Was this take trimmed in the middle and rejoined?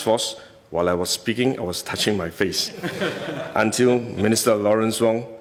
no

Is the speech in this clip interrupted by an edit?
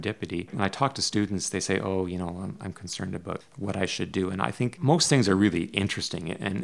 no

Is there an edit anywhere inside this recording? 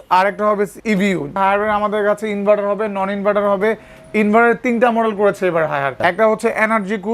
yes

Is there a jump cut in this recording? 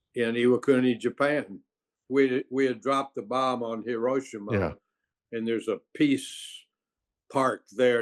yes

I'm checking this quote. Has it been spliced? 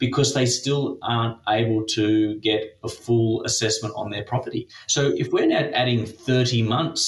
yes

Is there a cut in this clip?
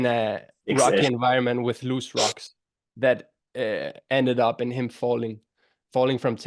no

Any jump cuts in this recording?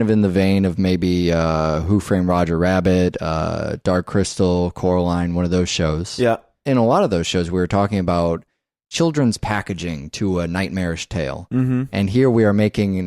yes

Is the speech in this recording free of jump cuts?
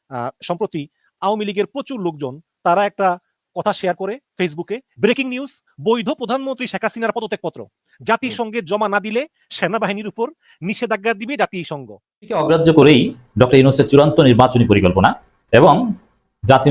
no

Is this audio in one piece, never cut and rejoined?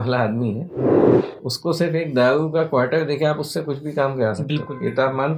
yes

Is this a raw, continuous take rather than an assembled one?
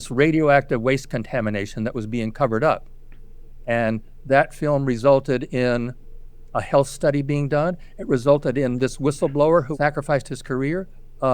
no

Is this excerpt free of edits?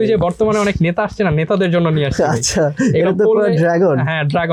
yes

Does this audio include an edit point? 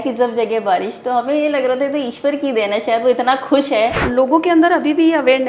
yes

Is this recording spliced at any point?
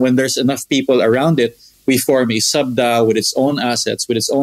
no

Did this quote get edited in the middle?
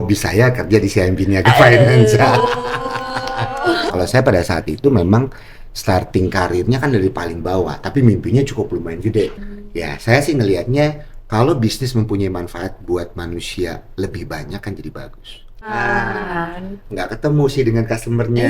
yes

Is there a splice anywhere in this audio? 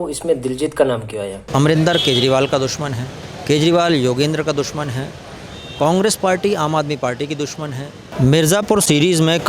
yes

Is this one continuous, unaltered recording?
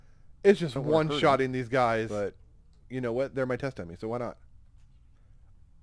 no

